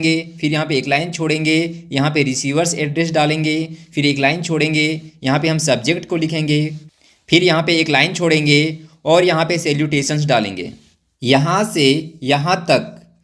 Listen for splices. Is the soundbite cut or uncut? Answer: uncut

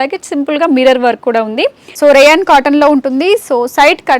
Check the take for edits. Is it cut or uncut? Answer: cut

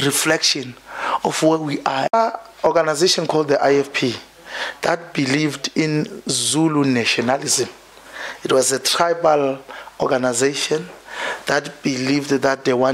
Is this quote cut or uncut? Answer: cut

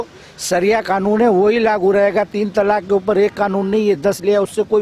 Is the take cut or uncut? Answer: uncut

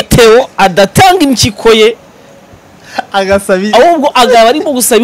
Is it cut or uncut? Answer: uncut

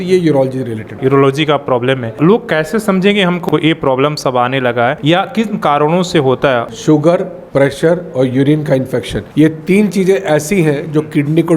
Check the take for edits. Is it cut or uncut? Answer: cut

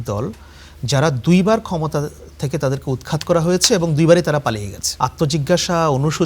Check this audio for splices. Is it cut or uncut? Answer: cut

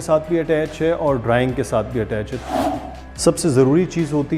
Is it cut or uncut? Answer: cut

